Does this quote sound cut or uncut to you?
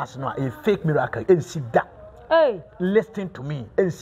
uncut